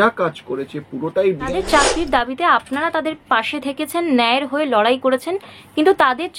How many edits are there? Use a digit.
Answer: 1